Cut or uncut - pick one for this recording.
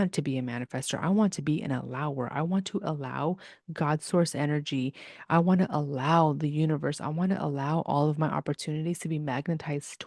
uncut